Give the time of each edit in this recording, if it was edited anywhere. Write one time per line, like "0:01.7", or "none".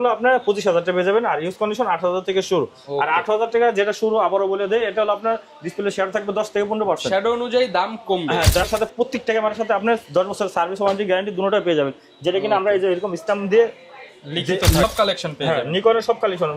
0:08.7
0:14.8